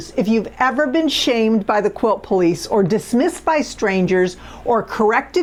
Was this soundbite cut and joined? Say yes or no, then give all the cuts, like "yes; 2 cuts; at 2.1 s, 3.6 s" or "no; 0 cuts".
no; 0 cuts